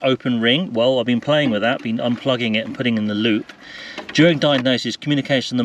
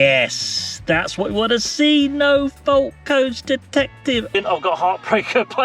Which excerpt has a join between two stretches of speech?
second; 1 cut; at 4.3 s

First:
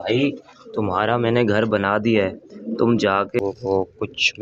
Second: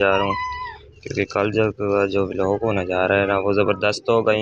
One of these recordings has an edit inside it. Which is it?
first; 1 cut; at 3.4 s

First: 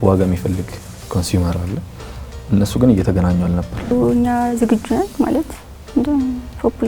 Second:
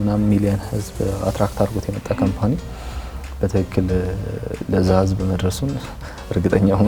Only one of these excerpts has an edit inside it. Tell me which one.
first; 1 cut; at 3.9 s

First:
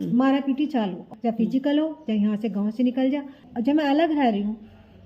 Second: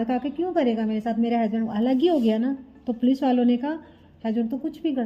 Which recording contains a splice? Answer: first; 2 cuts; at 1.1 s, 3.4 s

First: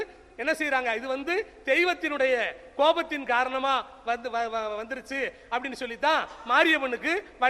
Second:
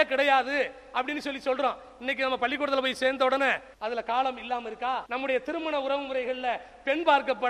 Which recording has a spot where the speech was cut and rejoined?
second; 2 cuts; at 3.7 s, 5.1 s

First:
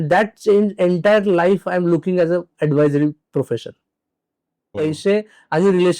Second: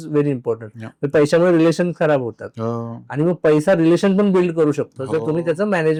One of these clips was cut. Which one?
first; 1 cut; at 4.8 s

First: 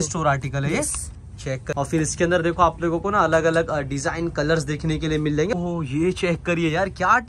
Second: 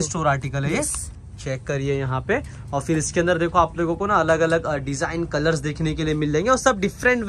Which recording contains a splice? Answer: first; 2 cuts; at 1.7 s, 5.5 s

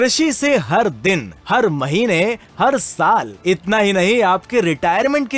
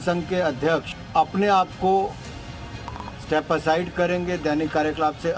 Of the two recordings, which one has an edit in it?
second; 1 cut; at 1.0 s

